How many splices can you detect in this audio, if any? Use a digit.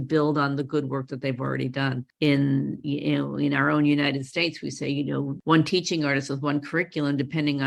1